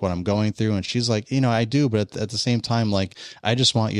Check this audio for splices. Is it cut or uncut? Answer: uncut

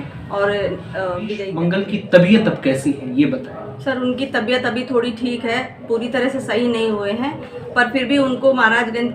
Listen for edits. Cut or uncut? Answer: cut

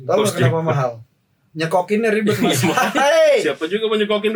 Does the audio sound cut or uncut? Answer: uncut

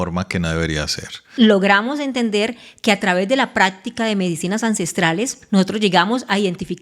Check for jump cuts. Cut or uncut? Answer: cut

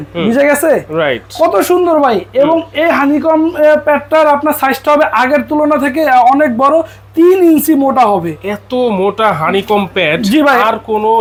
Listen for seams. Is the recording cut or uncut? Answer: uncut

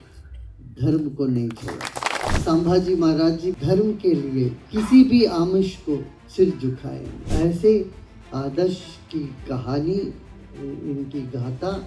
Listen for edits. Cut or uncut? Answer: cut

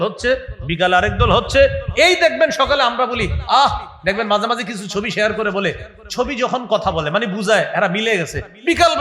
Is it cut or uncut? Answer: uncut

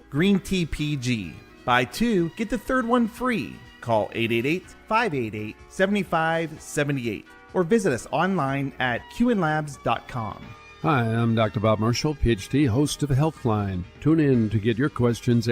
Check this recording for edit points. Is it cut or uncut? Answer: uncut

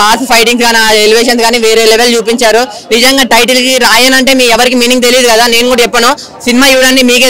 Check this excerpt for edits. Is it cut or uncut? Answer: uncut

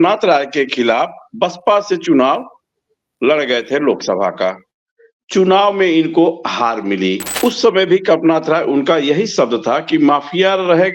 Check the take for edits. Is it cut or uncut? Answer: cut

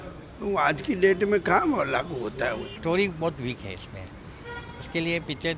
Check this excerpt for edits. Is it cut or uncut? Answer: cut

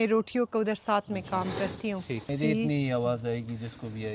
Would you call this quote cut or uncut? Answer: cut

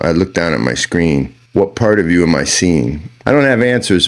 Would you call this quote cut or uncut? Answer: cut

